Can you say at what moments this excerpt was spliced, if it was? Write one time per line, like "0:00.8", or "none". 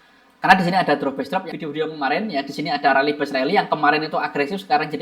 0:01.5